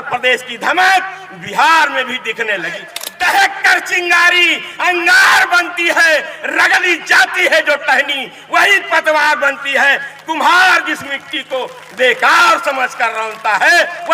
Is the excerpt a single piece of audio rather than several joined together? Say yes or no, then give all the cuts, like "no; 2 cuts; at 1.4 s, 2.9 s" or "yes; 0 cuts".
no; 1 cut; at 3.0 s